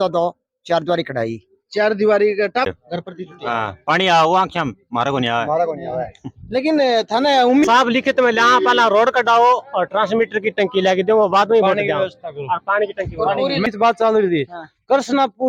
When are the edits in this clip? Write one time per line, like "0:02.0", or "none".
0:02.6
0:07.6
0:13.6